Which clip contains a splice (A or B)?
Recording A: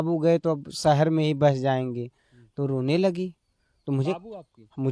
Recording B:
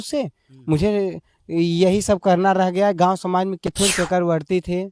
B